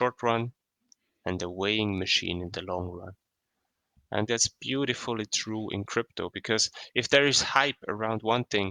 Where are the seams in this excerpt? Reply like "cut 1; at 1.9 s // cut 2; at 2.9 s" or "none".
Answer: cut 1; at 4.3 s